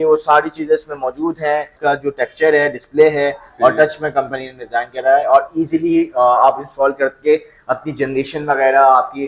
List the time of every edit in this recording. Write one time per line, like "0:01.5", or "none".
0:01.7